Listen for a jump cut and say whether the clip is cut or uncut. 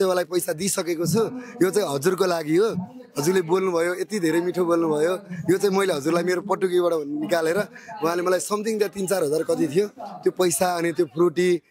uncut